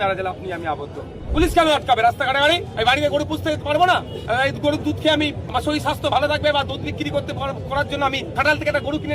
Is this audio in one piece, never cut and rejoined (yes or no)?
no